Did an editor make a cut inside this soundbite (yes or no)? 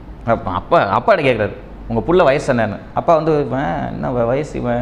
no